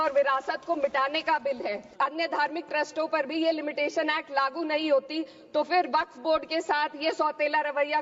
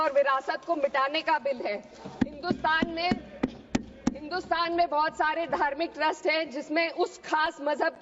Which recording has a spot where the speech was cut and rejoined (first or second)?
first